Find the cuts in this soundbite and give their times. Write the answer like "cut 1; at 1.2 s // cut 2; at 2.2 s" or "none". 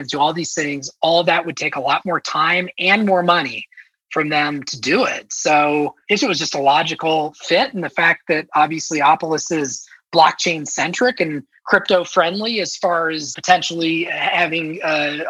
cut 1; at 13.4 s